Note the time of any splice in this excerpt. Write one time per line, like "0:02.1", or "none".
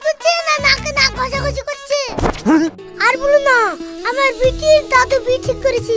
0:02.9